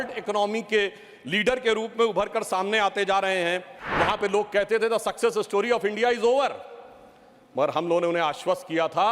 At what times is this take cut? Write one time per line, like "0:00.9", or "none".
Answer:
0:03.8